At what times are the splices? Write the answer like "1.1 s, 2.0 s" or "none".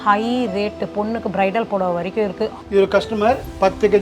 2.6 s